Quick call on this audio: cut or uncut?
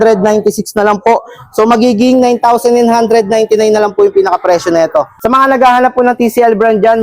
cut